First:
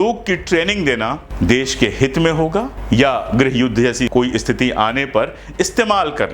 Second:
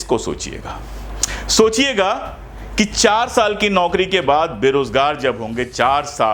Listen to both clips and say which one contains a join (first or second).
first